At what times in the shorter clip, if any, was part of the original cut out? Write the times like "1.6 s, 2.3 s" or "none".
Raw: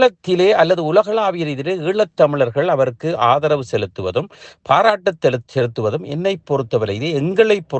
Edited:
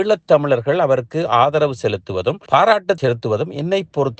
2.4 s, 3.0 s